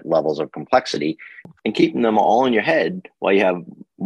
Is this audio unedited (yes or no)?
no